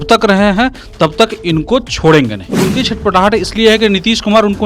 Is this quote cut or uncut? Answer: cut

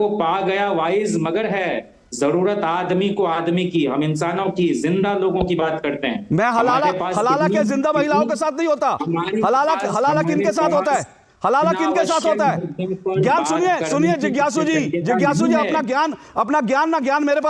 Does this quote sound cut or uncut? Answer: uncut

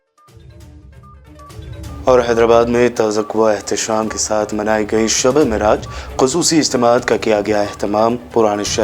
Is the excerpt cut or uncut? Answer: cut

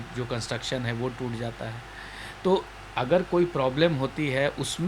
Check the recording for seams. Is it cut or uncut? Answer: uncut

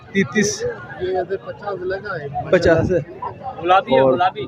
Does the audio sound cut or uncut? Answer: cut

